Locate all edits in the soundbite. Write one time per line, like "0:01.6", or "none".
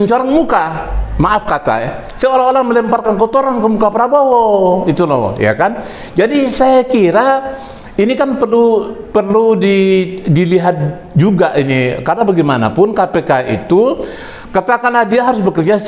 none